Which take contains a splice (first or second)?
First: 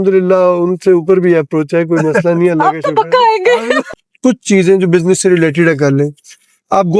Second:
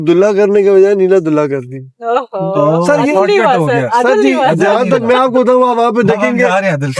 first